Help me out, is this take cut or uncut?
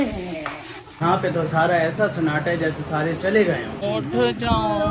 cut